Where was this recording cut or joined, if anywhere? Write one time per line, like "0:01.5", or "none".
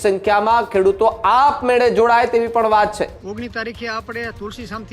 0:03.2